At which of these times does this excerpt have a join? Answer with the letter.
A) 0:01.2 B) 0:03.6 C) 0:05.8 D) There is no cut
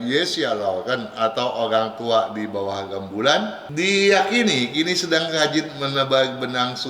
B